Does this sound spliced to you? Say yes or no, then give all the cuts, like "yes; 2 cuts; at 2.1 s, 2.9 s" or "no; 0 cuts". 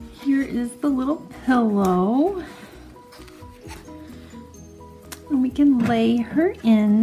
yes; 1 cut; at 2.3 s